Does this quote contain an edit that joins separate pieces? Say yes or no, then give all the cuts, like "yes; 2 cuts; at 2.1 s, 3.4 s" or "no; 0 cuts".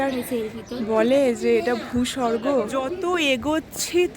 yes; 1 cut; at 2.7 s